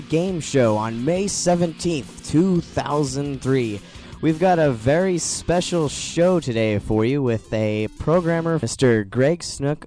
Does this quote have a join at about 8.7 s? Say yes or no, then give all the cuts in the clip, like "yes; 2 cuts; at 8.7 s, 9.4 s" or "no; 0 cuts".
yes; 1 cut; at 8.7 s